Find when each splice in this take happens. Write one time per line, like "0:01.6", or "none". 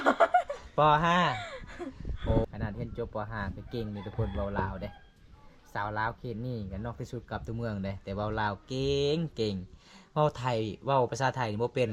0:02.5